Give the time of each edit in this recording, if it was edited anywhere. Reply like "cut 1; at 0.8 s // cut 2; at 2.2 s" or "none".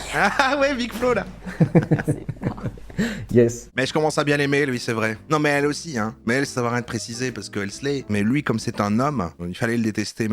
cut 1; at 1.2 s // cut 2; at 3.7 s // cut 3; at 9.4 s